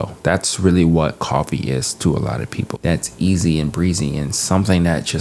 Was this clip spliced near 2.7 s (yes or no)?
yes